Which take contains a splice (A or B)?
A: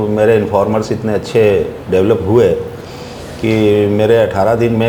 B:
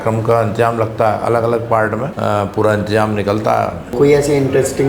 B